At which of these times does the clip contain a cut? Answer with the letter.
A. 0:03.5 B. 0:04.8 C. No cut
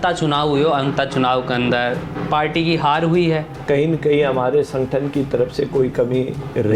A